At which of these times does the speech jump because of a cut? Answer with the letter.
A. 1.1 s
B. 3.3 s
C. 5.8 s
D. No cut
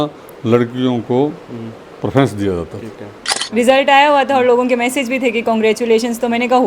B